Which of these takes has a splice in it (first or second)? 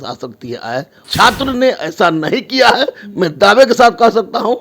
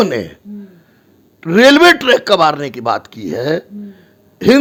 first